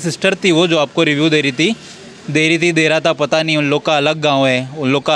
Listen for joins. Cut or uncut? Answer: uncut